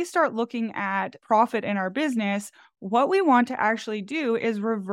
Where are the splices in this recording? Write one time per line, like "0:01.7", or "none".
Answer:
0:01.1